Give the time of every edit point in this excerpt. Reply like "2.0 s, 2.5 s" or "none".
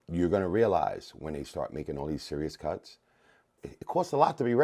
3.7 s